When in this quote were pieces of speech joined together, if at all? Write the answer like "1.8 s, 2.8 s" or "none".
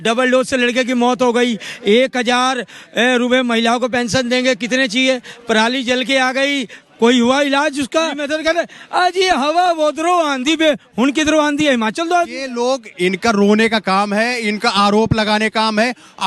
8.3 s, 12.5 s